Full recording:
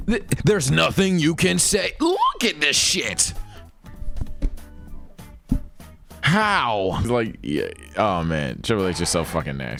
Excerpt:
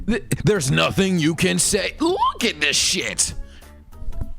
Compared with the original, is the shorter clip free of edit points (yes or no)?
yes